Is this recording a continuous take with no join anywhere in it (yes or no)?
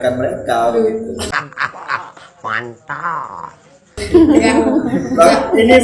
yes